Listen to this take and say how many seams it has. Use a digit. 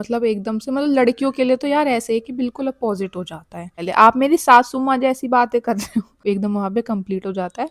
2